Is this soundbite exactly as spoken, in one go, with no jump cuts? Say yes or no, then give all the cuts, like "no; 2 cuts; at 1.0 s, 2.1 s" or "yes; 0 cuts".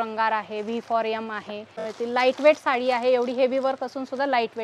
no; 1 cut; at 1.9 s